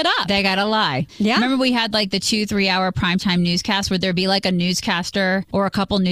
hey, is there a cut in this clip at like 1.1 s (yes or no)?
yes